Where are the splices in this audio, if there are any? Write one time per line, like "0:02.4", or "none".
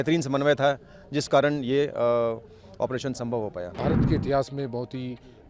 0:03.7